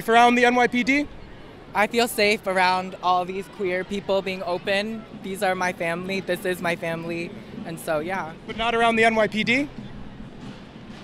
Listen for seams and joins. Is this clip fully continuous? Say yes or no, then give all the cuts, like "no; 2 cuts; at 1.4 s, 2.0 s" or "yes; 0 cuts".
yes; 0 cuts